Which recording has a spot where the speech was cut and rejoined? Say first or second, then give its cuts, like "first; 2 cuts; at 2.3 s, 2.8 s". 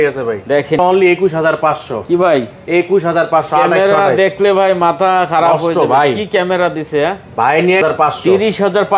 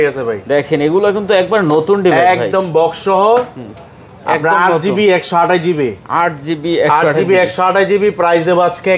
first; 2 cuts; at 0.8 s, 7.8 s